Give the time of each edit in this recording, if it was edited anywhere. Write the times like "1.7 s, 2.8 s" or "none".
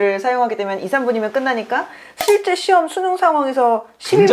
none